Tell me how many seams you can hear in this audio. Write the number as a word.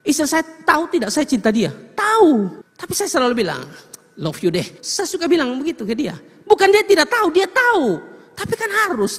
two